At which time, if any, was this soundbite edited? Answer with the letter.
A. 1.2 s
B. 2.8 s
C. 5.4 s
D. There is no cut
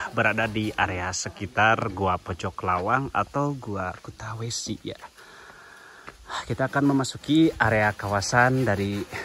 D